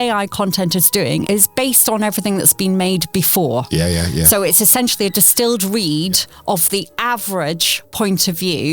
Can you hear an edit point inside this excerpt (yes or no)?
yes